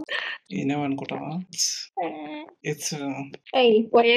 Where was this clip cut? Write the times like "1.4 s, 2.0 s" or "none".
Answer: 1.8 s

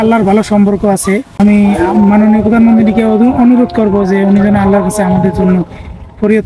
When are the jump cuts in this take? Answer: 1.3 s

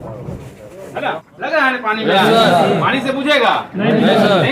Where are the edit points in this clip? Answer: 1.3 s

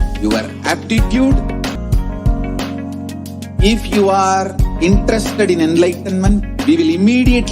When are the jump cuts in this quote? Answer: 1.8 s

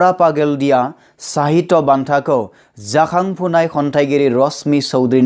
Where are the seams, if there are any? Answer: none

